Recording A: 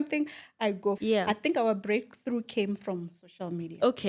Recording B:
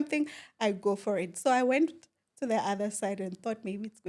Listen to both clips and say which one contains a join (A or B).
A